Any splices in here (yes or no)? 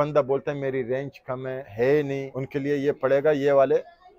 yes